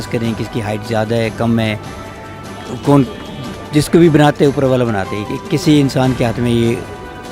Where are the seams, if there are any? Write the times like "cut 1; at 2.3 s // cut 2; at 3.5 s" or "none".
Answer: none